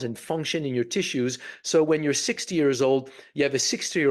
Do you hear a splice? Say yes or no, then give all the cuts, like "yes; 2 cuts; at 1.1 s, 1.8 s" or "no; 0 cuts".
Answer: no; 0 cuts